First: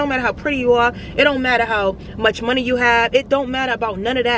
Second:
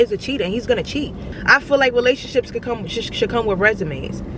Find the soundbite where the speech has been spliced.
second; 1 cut; at 1.3 s

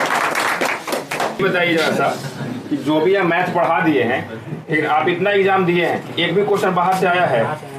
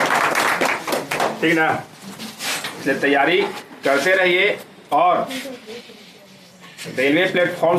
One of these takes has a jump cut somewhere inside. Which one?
first; 1 cut; at 1.4 s

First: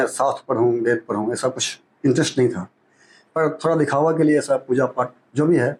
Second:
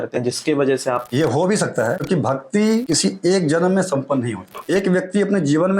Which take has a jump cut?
second; 4 cuts; at 1.1 s, 2.0 s, 2.9 s, 4.5 s

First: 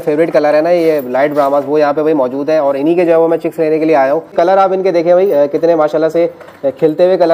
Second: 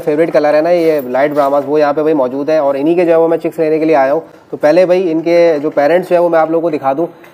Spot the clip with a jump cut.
first; 1 cut; at 4.3 s

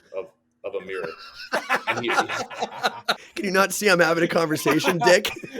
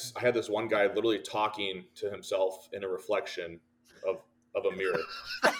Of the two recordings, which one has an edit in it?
first; 1 cut; at 3.2 s

